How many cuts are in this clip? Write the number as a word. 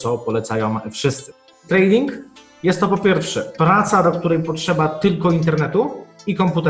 one